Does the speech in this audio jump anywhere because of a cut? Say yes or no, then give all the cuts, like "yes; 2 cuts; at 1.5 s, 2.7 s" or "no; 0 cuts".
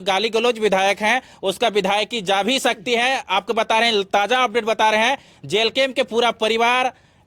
no; 0 cuts